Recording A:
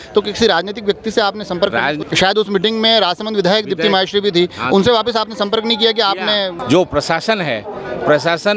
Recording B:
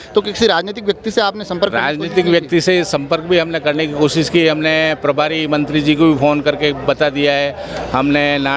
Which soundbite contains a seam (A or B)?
A